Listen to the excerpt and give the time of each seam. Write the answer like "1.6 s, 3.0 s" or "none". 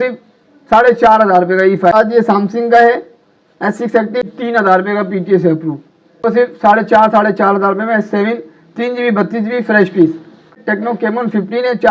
1.9 s, 4.4 s, 6.2 s, 10.5 s